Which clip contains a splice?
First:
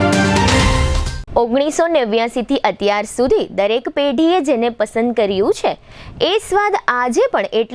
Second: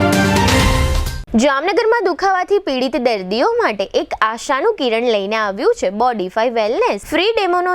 second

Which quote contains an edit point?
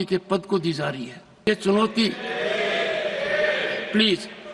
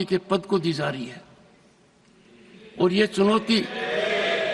first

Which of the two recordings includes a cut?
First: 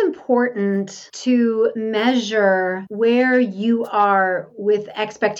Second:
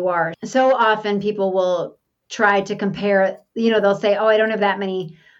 first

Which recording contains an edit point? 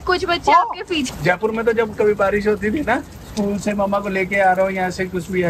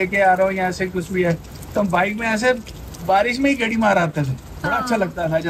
first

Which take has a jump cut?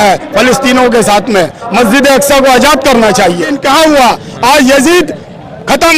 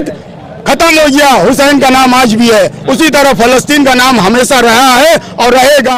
first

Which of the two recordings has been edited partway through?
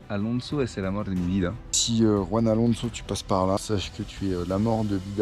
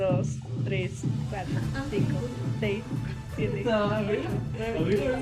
first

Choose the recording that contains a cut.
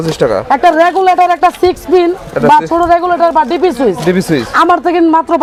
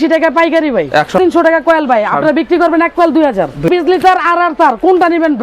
second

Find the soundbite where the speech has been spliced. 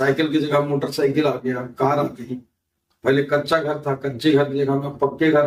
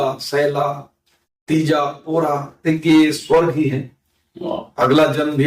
second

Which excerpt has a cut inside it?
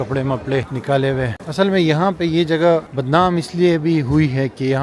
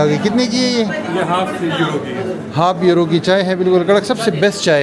first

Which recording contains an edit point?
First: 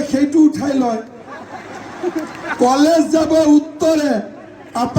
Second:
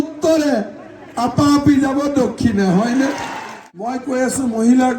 second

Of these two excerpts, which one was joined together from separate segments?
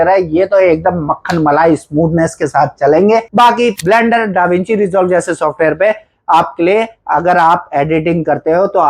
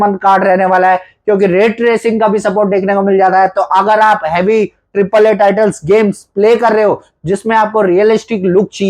first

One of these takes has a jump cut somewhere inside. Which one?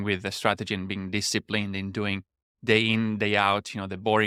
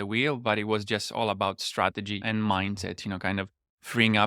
second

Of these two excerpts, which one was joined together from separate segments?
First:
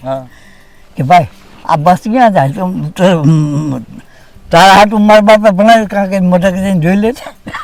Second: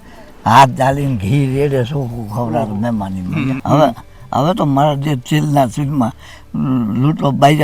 second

